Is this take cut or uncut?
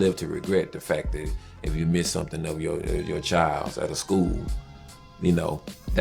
uncut